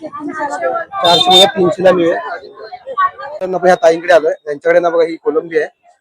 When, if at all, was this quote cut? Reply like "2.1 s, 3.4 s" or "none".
3.3 s